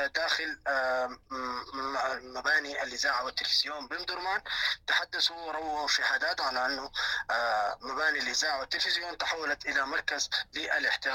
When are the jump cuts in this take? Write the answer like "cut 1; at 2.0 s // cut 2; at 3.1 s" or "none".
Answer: none